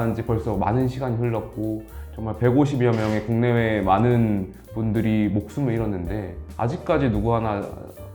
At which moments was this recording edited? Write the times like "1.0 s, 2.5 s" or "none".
none